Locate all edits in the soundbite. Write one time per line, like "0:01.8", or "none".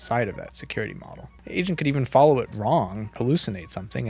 0:01.3
0:03.1